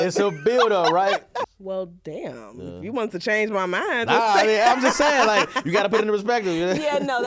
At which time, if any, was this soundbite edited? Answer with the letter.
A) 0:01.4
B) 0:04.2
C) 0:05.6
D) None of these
A